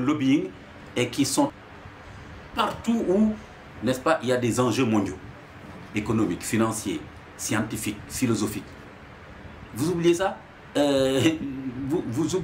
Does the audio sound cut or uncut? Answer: cut